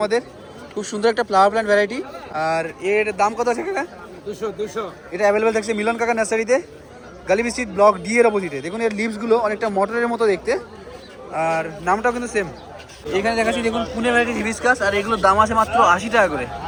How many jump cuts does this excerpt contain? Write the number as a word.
zero